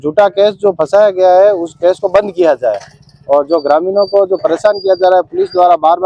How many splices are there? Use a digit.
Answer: 0